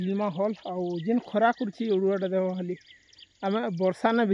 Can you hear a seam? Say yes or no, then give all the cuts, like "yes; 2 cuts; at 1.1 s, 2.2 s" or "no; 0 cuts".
no; 0 cuts